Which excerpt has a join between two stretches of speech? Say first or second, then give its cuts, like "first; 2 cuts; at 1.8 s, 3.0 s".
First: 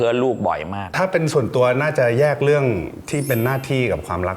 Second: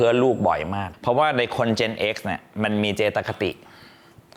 first; 1 cut; at 0.9 s